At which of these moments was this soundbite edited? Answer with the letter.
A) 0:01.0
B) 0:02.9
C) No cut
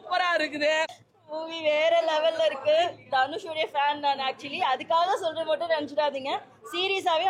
A